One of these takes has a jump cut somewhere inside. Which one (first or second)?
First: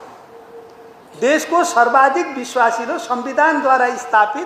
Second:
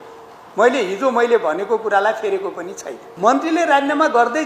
second